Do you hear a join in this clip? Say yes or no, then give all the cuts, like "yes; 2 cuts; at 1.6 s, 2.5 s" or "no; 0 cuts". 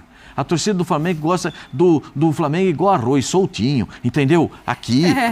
no; 0 cuts